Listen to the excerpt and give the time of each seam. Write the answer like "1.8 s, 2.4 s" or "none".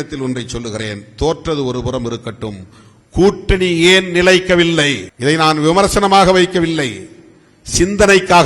5.1 s